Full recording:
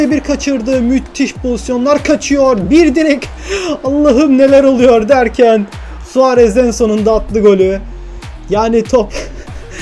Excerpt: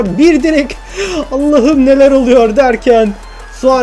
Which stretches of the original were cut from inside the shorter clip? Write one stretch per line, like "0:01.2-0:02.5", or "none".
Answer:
none

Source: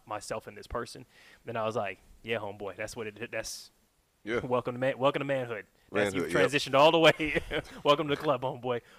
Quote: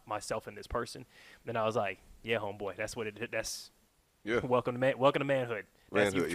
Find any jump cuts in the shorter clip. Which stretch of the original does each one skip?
none

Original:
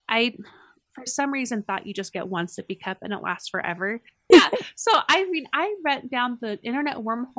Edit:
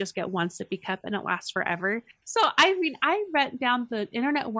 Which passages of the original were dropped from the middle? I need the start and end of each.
0:04.1-0:04.6

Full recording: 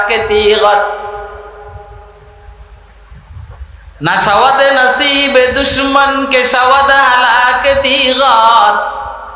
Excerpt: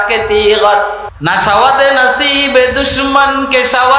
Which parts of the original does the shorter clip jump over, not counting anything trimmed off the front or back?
0:01.1-0:03.9

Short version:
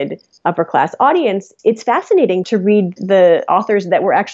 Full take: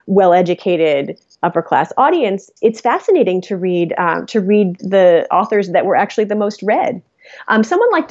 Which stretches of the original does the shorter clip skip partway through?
0:03.4-0:04.3

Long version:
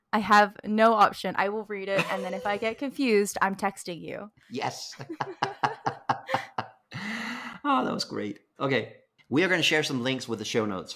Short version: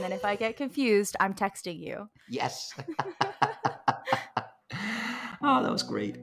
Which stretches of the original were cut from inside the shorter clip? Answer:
none

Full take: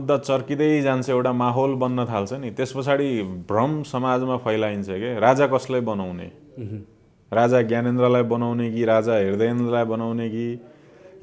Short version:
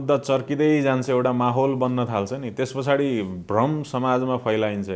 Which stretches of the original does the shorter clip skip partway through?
none

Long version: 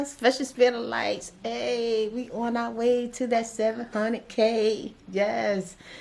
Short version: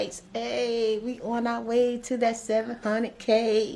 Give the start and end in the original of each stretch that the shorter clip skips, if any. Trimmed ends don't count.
none

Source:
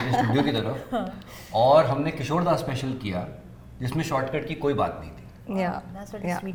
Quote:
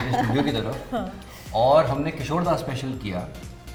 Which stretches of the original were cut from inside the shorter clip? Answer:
none

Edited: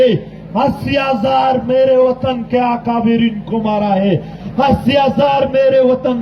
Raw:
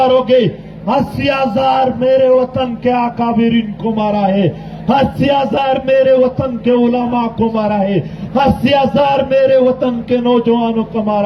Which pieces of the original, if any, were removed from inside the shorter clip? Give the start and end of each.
0:04.7-0:08.2

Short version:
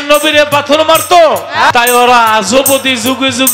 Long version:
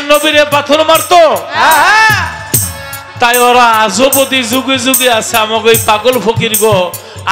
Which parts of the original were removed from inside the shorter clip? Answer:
0:01.7-0:03.2

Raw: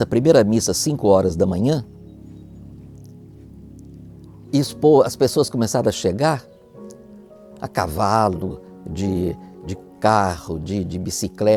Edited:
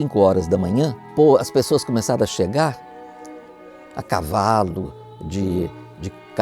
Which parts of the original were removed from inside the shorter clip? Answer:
0:01.9-0:04.7

